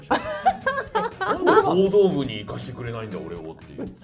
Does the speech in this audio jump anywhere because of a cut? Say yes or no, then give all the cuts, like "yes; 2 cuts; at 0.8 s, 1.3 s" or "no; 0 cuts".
no; 0 cuts